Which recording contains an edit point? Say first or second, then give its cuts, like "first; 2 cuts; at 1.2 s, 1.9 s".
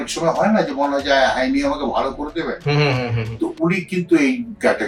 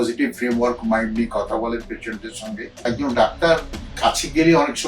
second; 1 cut; at 2.8 s